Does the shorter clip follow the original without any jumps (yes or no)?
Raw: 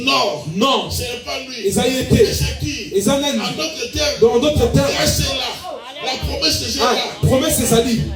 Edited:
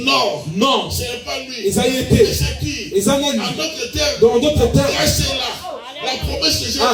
yes